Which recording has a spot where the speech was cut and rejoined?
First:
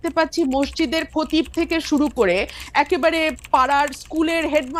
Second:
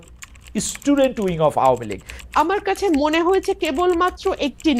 second; 1 cut; at 2.0 s

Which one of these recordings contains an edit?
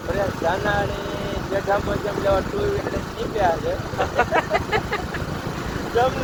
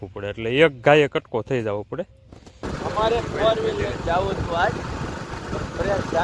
second; 1 cut; at 2.7 s

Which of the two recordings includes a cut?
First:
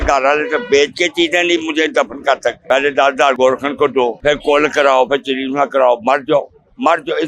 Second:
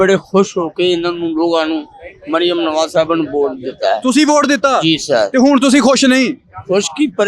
first; 3 cuts; at 2.6 s, 3.4 s, 4.2 s

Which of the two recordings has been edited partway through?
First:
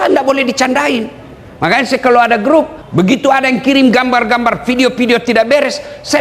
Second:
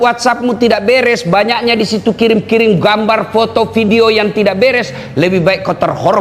first; 1 cut; at 2.8 s

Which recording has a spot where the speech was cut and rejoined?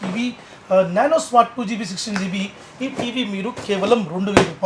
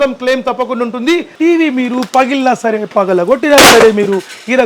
second; 1 cut; at 1.3 s

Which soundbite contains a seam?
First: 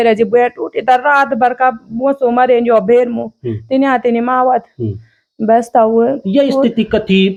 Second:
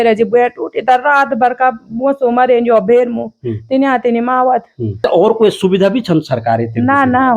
second; 1 cut; at 5.0 s

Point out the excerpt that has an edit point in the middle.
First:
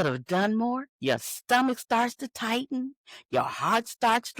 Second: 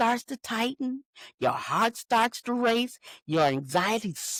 first; 1 cut; at 0.9 s

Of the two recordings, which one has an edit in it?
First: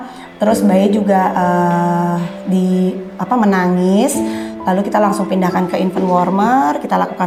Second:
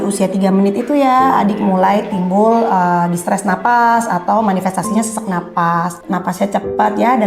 second; 1 cut; at 6.0 s

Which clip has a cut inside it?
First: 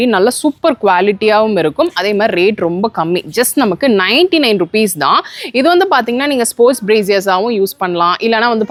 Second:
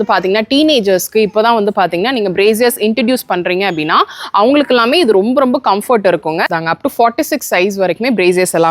second; 1 cut; at 6.5 s

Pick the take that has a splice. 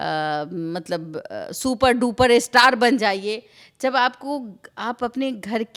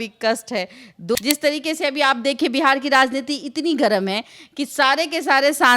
second; 1 cut; at 1.2 s

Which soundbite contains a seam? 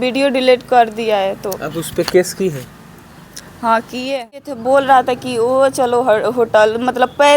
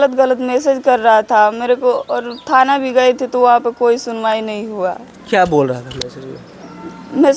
first; 1 cut; at 4.5 s

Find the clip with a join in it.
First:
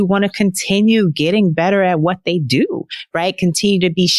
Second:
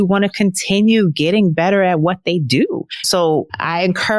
second; 1 cut; at 3.1 s

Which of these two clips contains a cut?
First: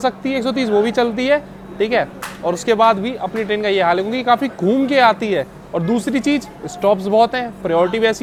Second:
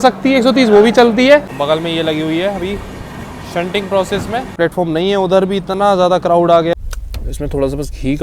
second; 3 cuts; at 1.5 s, 4.5 s, 6.7 s

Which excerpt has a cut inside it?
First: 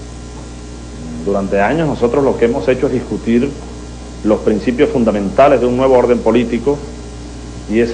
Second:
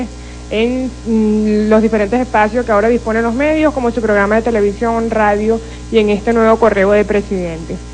second; 1 cut; at 1.0 s

